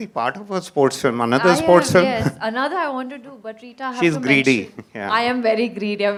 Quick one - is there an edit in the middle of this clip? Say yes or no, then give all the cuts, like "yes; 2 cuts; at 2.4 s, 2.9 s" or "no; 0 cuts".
no; 0 cuts